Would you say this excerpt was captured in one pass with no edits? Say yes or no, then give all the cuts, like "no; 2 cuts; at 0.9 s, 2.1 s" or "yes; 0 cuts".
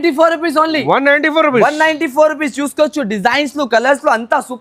yes; 0 cuts